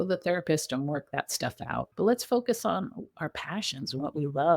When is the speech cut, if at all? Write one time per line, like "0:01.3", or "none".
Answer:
0:01.8

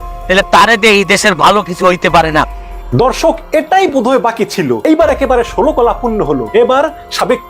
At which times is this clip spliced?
0:02.6
0:04.8
0:06.4

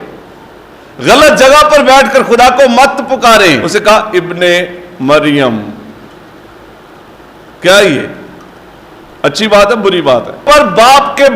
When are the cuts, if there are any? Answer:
0:03.6
0:10.4

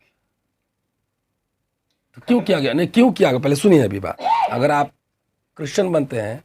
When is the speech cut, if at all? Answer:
0:04.1

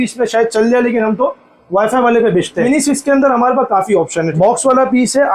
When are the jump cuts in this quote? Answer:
0:02.7
0:04.3

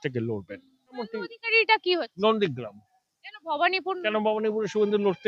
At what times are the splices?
0:01.1

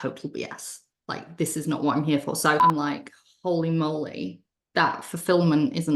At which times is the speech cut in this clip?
0:02.6

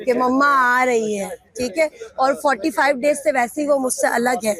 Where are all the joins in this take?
none

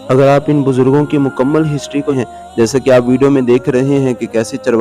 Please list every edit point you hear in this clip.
0:02.1

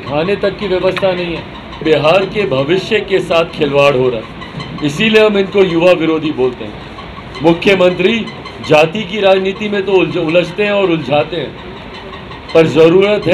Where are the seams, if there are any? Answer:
0:01.8

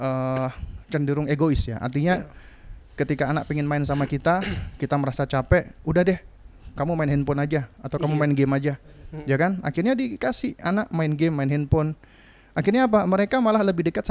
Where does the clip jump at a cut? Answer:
none

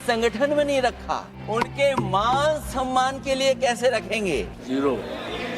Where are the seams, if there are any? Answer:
0:01.4
0:04.6

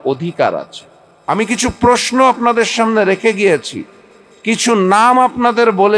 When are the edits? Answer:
0:01.2

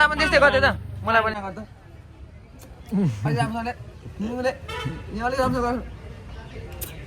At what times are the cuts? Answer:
0:01.3

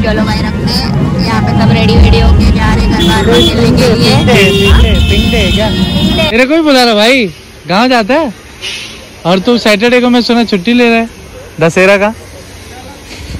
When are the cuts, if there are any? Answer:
0:06.3

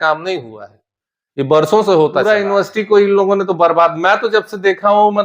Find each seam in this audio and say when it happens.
0:02.3

